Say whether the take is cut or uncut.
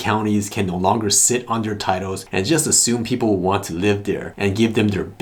uncut